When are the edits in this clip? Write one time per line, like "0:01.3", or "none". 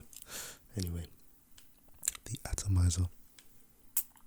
none